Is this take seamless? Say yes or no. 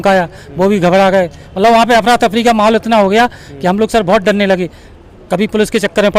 yes